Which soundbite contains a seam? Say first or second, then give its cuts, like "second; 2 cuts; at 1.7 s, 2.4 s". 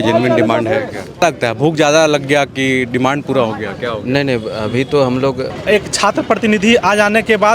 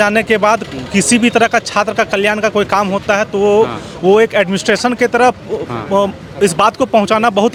first; 2 cuts; at 1.2 s, 5.5 s